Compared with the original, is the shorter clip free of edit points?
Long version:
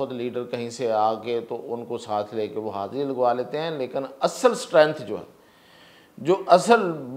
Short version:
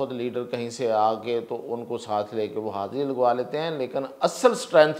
yes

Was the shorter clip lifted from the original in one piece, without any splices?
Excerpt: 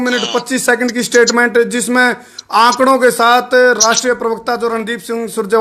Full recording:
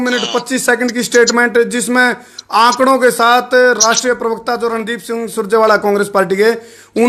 yes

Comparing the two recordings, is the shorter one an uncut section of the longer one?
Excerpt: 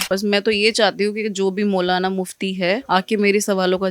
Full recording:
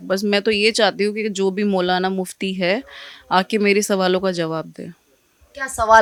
no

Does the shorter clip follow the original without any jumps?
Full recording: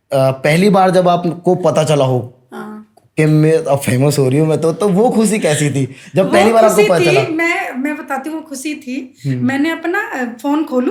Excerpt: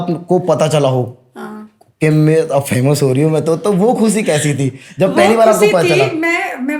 yes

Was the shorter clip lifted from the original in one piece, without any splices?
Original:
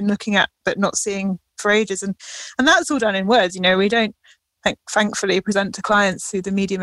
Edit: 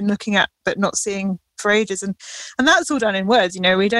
yes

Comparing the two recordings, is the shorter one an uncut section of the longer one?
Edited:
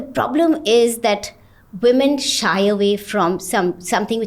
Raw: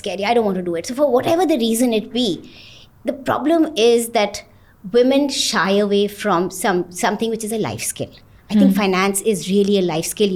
yes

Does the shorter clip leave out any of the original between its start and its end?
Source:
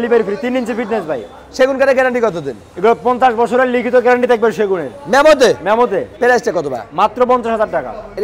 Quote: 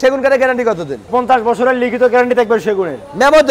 yes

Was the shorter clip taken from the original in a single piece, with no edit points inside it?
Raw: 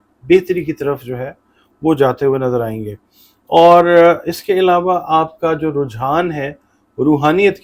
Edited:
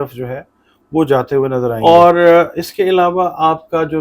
no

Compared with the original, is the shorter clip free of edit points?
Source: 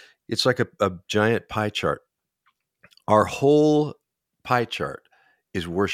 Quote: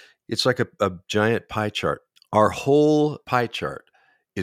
no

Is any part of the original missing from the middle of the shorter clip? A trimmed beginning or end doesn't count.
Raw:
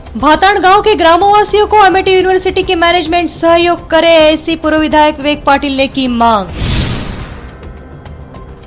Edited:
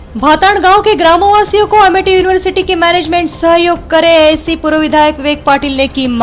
no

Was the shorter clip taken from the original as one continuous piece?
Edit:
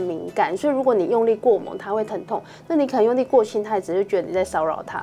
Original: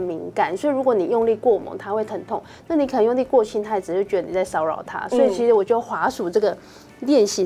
yes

